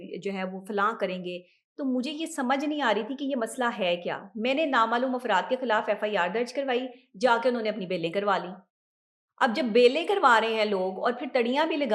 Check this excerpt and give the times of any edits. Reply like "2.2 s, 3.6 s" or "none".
none